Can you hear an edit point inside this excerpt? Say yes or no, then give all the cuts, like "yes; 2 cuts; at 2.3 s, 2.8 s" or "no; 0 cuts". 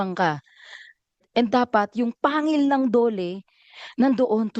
yes; 1 cut; at 1.2 s